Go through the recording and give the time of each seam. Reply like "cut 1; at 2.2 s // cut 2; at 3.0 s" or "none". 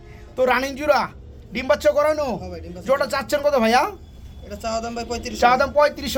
none